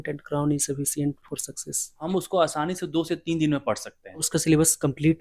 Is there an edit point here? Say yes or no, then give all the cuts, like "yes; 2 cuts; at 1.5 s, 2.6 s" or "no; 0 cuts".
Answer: yes; 2 cuts; at 2.1 s, 4.3 s